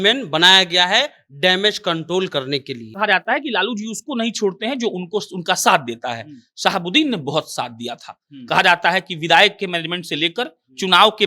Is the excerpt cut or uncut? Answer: cut